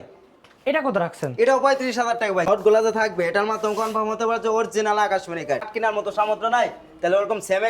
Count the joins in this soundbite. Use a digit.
2